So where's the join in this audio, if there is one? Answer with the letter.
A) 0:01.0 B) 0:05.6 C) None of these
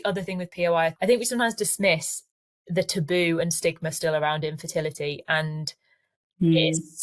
A